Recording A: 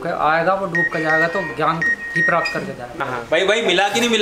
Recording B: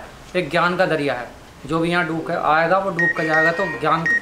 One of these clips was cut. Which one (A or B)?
A